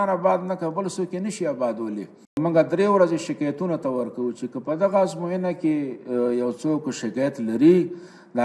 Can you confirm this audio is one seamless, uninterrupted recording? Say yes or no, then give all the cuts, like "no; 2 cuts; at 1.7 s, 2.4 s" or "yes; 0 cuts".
no; 1 cut; at 2.4 s